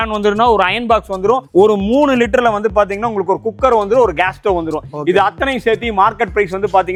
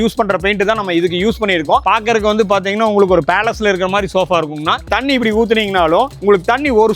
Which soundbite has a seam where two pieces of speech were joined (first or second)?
second